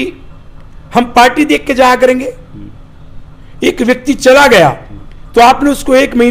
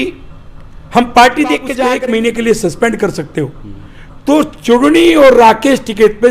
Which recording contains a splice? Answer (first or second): second